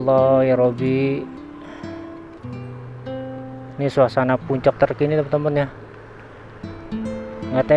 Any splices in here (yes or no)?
yes